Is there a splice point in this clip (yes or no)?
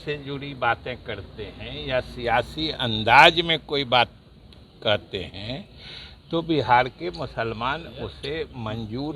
no